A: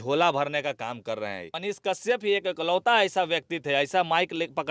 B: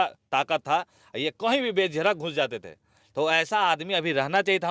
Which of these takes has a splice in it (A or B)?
A